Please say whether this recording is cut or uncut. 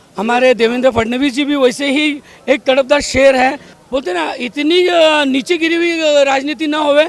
cut